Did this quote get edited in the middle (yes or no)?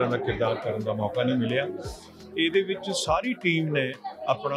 no